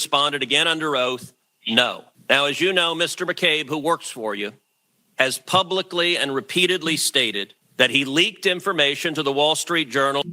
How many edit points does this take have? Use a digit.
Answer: 1